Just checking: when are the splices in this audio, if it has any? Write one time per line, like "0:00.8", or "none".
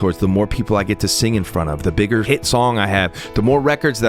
0:02.2